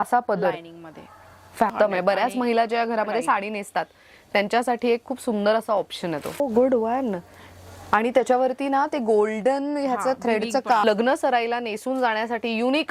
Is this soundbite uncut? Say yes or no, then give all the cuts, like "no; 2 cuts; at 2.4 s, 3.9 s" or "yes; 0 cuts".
no; 3 cuts; at 1.7 s, 6.4 s, 10.8 s